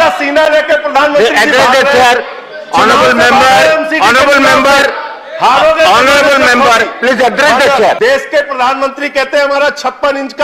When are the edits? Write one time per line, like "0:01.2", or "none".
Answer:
0:08.0